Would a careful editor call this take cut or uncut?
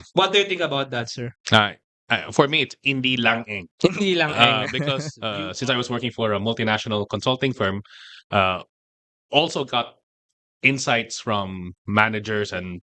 cut